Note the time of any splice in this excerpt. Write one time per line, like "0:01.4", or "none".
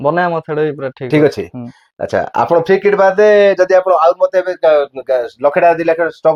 none